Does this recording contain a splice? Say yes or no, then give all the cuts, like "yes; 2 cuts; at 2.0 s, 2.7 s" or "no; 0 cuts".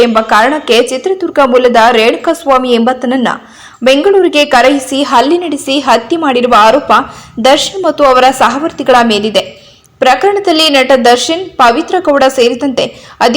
yes; 1 cut; at 9.6 s